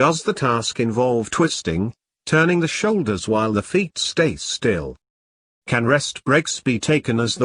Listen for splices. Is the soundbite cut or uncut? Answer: cut